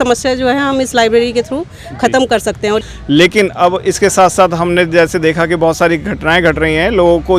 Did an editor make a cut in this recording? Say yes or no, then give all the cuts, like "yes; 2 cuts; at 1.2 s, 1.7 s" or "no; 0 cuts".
yes; 1 cut; at 2.8 s